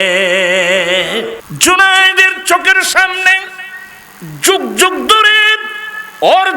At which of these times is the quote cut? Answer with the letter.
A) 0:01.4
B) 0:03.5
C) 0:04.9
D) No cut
A